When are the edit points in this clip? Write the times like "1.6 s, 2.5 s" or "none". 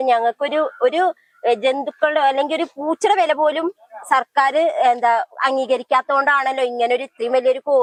none